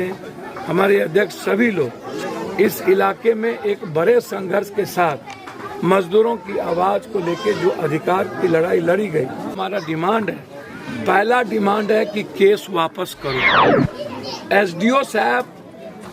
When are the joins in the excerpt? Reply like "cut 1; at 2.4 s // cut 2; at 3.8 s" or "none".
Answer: cut 1; at 9.5 s